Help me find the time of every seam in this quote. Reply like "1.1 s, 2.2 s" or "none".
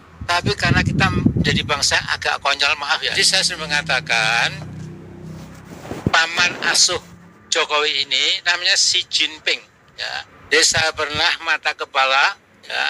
3.1 s, 10.3 s

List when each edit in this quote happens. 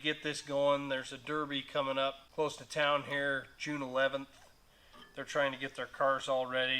2.2 s

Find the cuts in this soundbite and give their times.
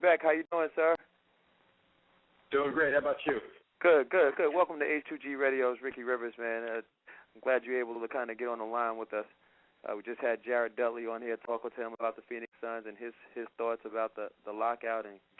none

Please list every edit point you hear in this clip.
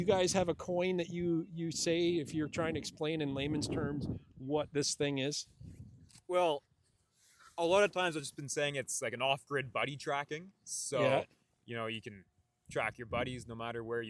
none

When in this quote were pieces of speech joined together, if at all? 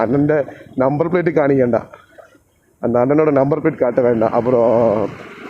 none

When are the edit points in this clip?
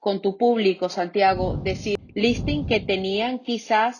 2.0 s

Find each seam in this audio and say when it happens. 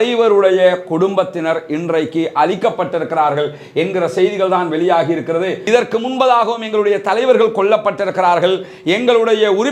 5.6 s

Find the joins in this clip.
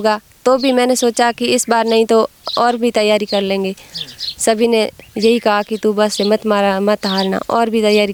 none

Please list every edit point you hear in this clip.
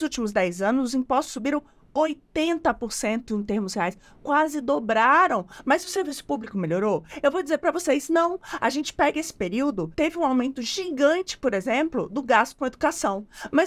9.9 s

